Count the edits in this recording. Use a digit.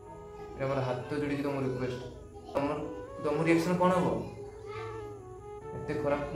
1